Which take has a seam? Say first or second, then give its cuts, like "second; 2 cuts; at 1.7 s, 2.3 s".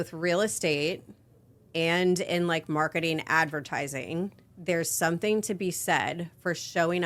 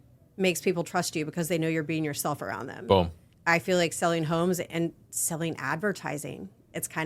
second; 1 cut; at 3.2 s